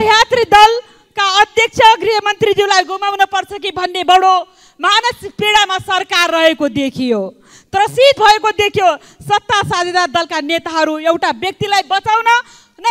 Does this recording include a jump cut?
no; 0 cuts

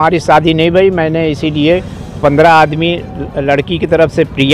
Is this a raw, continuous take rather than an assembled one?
yes; 0 cuts

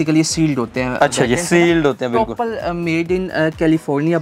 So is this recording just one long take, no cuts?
yes; 0 cuts

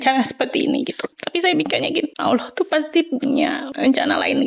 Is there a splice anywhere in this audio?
yes; 3 cuts; at 1.2 s, 2.1 s, 3.7 s

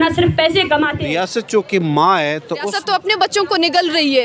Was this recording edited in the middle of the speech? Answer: yes; 2 cuts; at 1.0 s, 2.7 s

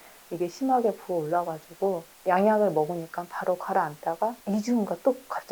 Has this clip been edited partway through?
yes; 2 cuts; at 2.1 s, 4.4 s

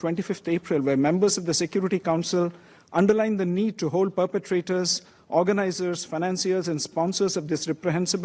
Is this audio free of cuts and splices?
yes; 0 cuts

